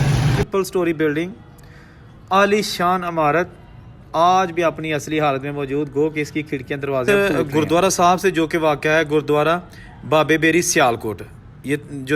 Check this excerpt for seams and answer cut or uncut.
cut